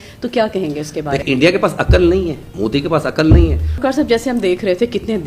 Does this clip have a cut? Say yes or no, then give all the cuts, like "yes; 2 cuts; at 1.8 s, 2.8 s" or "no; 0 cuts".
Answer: yes; 3 cuts; at 1.2 s, 2.4 s, 3.7 s